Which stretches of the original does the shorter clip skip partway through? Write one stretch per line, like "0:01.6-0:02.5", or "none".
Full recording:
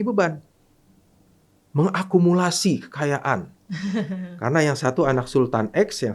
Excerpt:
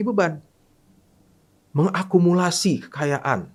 none